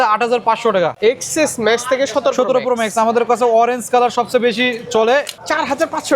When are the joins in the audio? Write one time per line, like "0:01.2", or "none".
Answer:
0:01.0
0:05.3